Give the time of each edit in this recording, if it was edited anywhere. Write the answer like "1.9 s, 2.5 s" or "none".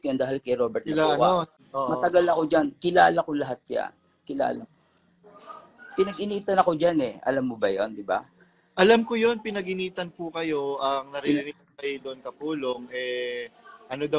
1.6 s